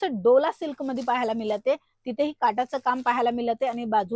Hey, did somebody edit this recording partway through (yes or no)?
no